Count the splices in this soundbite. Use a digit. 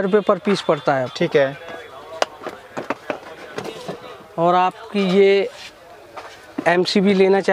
0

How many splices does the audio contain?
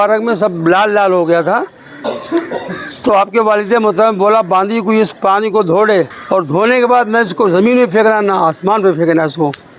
1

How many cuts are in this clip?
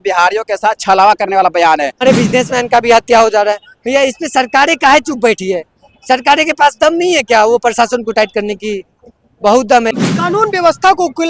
2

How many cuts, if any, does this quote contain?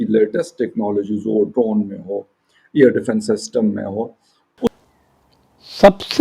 1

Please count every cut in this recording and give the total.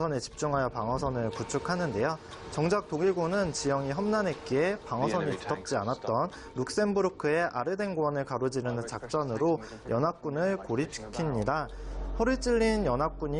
1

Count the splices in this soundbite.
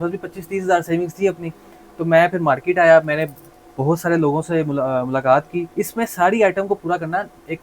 1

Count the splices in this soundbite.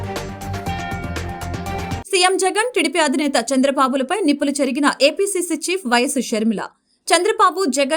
1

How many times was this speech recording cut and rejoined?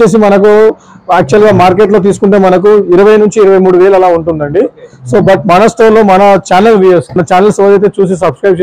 1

